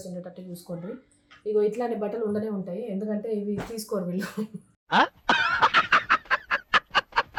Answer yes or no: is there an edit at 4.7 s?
no